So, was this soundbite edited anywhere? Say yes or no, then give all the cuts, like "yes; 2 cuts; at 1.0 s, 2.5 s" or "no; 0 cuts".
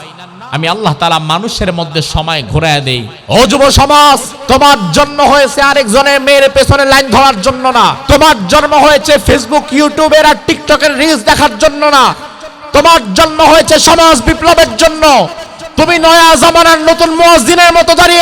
yes; 3 cuts; at 3.1 s, 4.3 s, 8.0 s